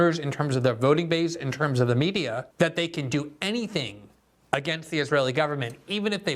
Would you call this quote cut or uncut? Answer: cut